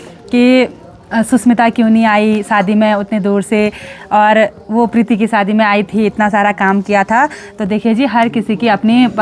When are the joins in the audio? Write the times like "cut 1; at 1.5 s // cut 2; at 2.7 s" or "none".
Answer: none